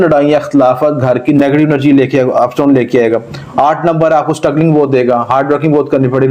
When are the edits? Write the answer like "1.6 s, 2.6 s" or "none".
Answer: 1.4 s